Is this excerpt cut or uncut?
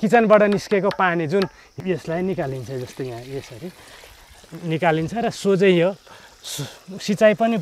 cut